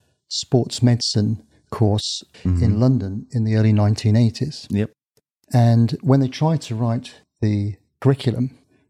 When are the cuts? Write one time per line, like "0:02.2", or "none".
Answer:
0:02.3